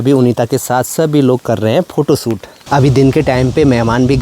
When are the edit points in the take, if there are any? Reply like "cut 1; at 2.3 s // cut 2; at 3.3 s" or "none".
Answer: cut 1; at 2.5 s